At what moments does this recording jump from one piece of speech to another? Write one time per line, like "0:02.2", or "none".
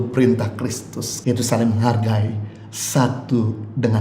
0:01.1